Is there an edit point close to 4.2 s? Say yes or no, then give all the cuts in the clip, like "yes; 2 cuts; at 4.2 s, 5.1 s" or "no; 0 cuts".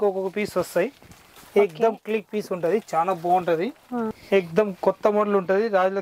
yes; 1 cut; at 4.2 s